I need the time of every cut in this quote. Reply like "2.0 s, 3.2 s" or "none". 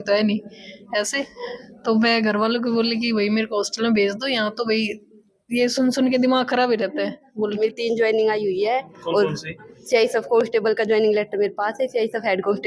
7.6 s